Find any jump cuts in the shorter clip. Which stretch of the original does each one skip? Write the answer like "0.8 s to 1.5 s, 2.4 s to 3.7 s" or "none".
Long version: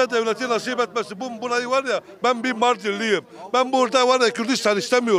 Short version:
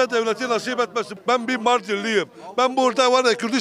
1.1 s to 2.1 s